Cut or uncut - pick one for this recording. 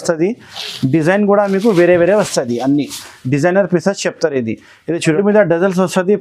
cut